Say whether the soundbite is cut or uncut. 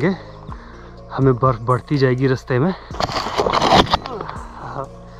cut